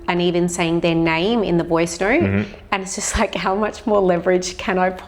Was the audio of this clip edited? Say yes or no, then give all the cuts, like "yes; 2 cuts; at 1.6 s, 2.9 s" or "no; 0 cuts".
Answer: no; 0 cuts